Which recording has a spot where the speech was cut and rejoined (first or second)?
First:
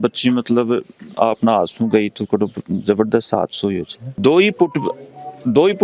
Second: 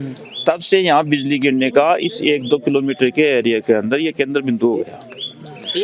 first